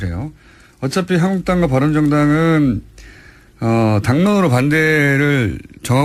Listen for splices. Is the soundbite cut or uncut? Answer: uncut